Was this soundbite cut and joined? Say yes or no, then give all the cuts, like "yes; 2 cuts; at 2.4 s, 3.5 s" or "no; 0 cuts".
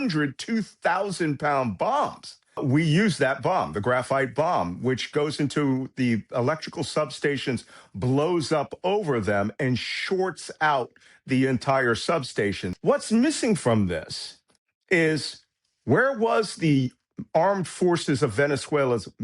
yes; 2 cuts; at 2.6 s, 12.7 s